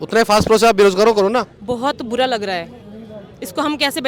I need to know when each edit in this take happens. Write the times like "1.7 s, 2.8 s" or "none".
1.6 s